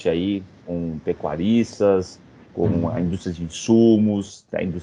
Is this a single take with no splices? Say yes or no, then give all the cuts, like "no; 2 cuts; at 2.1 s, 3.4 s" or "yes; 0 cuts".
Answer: yes; 0 cuts